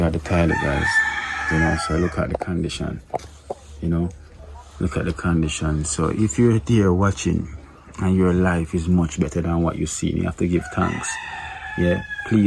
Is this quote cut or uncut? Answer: uncut